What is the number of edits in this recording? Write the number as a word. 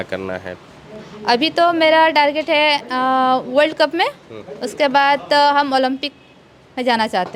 zero